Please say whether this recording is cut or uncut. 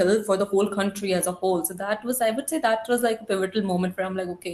uncut